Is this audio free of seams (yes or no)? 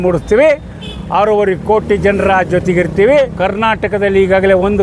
no